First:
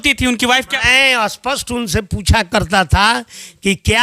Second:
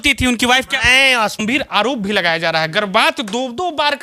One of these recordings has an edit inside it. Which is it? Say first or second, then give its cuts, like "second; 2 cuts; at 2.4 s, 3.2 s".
second; 1 cut; at 1.4 s